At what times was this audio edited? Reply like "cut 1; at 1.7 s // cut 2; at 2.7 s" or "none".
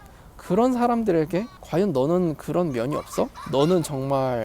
cut 1; at 3.4 s